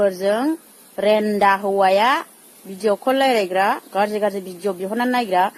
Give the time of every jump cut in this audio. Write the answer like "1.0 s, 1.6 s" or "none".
none